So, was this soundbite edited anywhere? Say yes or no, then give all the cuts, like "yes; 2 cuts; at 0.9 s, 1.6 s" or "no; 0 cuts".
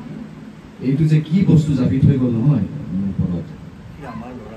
no; 0 cuts